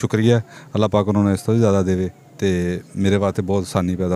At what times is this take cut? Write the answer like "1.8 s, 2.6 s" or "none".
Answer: none